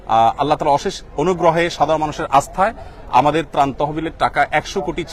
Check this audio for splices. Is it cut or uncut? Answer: uncut